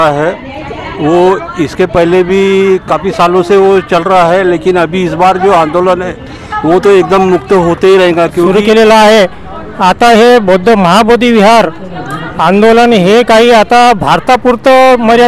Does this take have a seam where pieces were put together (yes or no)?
yes